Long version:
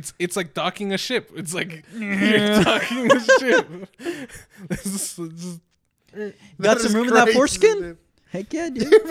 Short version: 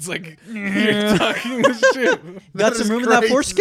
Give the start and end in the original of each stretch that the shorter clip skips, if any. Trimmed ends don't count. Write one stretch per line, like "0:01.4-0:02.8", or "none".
0:03.8-0:06.4